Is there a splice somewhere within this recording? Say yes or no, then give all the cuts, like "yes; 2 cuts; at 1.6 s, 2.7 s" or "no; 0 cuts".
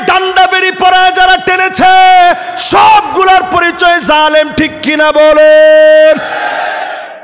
no; 0 cuts